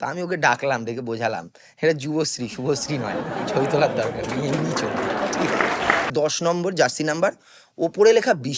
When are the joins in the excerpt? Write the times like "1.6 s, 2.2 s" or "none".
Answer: 6.1 s